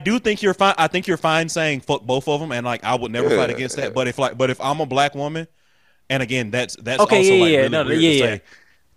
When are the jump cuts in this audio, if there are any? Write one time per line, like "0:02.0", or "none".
none